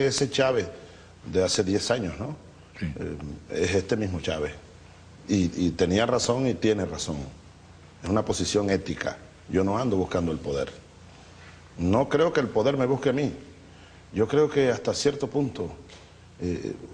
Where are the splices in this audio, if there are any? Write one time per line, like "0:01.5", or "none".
none